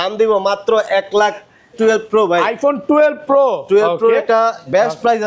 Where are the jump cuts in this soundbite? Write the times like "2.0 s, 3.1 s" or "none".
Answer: 1.7 s